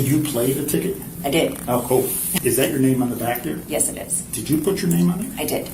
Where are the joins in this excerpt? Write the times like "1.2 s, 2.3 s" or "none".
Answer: 2.4 s